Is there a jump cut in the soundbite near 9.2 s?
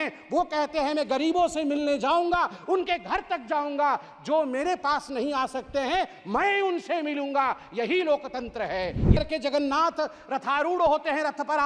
yes; 1 cut; at 9.2 s

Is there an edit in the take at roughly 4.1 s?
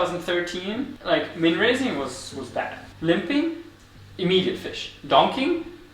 no; 2 cuts; at 1.0 s, 2.8 s

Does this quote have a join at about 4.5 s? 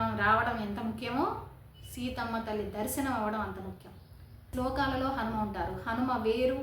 yes; 1 cut; at 4.5 s

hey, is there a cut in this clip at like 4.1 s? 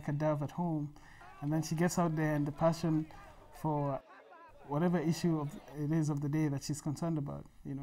yes; 1 cut; at 4.1 s

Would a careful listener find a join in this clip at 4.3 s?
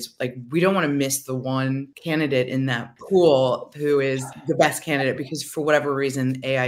yes; 3 cuts; at 1.9 s, 2.9 s, 4.3 s

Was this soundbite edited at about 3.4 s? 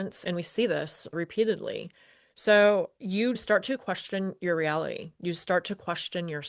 yes; 1 cut; at 3.4 s

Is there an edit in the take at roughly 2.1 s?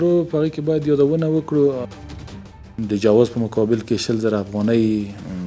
yes; 1 cut; at 2.1 s

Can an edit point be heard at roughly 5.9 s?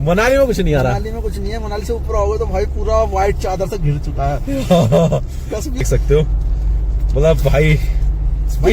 yes; 1 cut; at 5.9 s

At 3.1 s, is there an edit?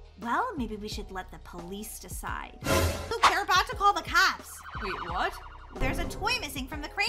yes; 2 cuts; at 3.1 s, 5.8 s

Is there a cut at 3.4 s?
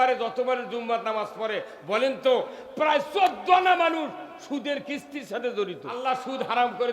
no; 1 cut; at 6.0 s

